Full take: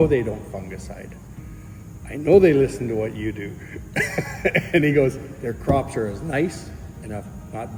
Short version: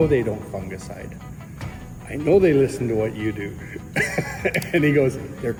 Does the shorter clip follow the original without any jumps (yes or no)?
yes